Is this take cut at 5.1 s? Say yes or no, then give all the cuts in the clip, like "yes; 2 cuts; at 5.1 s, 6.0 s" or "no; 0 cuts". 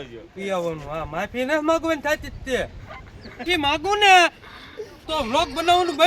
no; 1 cut; at 3.4 s